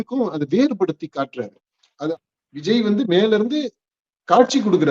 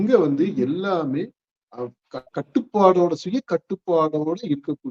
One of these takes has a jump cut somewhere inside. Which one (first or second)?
first